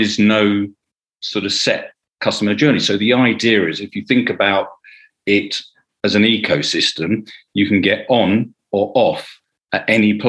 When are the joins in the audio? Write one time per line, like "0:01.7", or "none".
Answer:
none